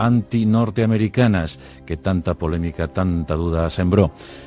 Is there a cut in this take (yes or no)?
no